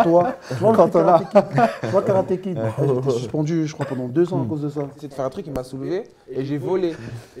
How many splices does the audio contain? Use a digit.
1